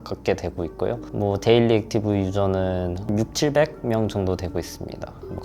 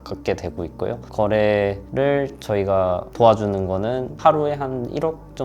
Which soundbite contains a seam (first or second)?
second